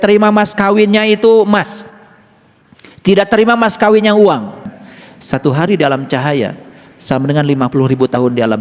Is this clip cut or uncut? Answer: cut